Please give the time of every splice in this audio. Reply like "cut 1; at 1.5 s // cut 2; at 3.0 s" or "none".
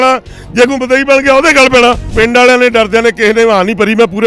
cut 1; at 2.1 s